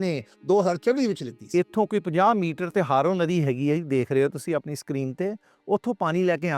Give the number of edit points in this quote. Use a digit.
1